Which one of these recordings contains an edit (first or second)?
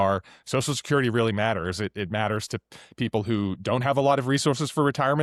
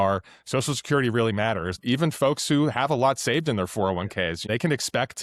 second